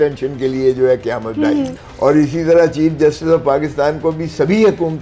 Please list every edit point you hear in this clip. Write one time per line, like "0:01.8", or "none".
0:01.8